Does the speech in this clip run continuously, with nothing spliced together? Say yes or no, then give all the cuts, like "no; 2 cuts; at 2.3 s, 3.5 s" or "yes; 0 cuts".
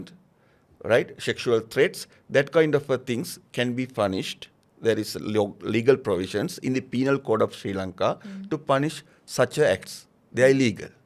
yes; 0 cuts